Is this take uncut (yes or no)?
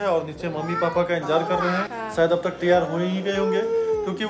yes